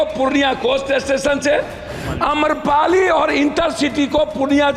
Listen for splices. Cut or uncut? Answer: uncut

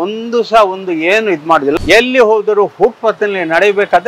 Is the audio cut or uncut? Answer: cut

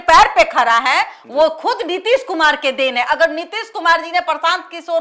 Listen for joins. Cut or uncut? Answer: uncut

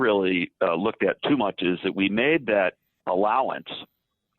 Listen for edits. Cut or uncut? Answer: cut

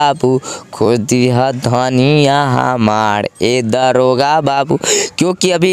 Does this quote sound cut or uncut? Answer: uncut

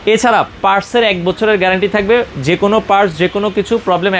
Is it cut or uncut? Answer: uncut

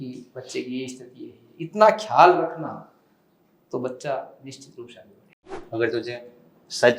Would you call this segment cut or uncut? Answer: cut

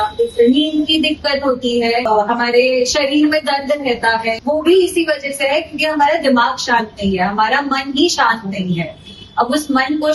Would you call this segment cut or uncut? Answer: cut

